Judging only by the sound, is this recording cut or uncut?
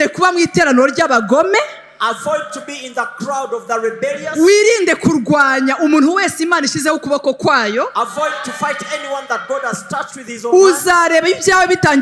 uncut